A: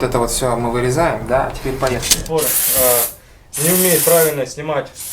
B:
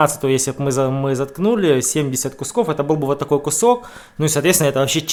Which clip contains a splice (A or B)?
A